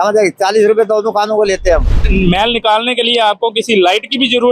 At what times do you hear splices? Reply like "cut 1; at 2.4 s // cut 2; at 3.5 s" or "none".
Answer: cut 1; at 2.0 s